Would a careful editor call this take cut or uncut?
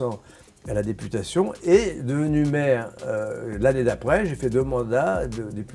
uncut